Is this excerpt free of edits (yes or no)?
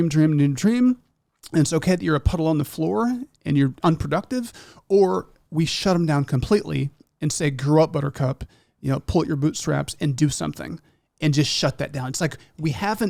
yes